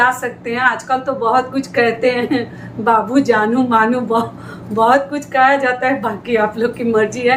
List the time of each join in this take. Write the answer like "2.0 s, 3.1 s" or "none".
none